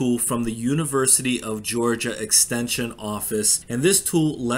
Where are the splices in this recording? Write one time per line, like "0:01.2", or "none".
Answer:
0:03.6